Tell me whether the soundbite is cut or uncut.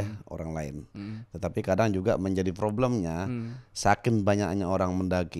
uncut